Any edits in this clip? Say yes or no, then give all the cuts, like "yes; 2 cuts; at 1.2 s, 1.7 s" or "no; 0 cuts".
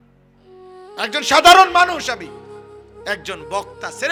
no; 0 cuts